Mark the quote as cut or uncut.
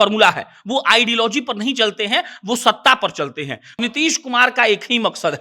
cut